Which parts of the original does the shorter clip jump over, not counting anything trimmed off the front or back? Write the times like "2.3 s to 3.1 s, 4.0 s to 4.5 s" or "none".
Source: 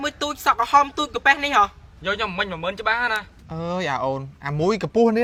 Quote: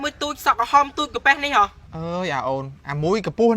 1.9 s to 3.4 s

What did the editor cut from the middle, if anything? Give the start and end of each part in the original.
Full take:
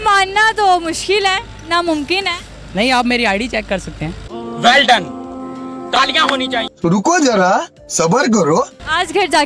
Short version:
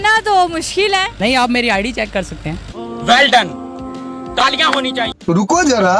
1.4 s to 2.7 s

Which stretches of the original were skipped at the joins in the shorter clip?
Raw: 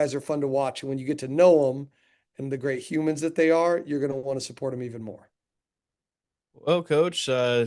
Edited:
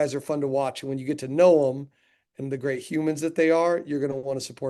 none

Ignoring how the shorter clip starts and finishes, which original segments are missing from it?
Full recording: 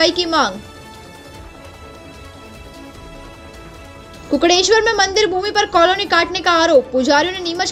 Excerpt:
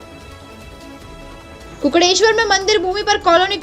3.7 s to 4.3 s

